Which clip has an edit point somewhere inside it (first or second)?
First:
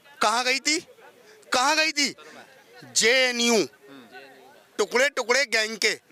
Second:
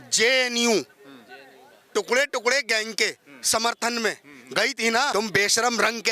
second